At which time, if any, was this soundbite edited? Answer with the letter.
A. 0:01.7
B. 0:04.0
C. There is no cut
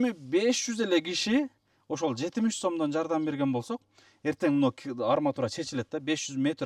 C